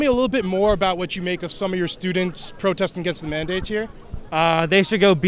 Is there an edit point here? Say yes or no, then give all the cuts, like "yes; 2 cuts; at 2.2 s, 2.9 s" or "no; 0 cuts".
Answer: no; 0 cuts